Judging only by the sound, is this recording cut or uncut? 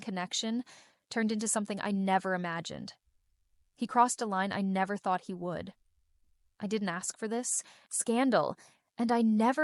uncut